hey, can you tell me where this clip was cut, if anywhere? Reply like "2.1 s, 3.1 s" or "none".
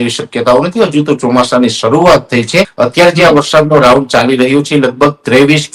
2.7 s